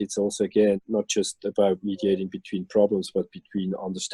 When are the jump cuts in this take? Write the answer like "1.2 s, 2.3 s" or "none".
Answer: none